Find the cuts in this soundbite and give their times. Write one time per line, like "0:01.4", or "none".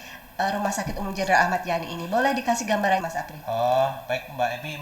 0:03.1